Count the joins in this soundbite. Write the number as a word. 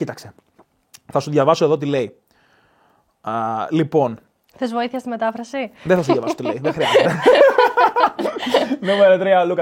zero